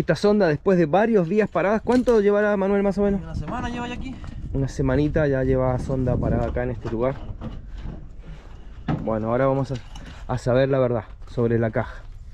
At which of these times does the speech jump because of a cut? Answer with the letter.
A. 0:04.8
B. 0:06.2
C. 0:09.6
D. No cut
D